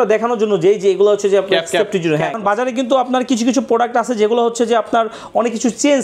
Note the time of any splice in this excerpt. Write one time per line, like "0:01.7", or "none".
0:02.4